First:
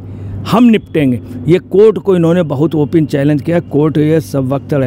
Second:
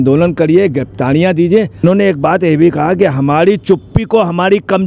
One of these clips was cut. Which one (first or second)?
second